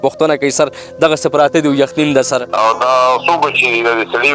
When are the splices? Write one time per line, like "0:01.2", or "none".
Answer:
0:02.5